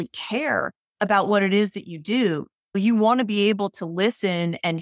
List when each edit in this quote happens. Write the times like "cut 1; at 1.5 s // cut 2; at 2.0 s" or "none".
cut 1; at 2.8 s